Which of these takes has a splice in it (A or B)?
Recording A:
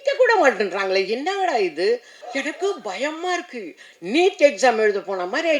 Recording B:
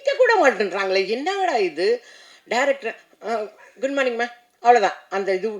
A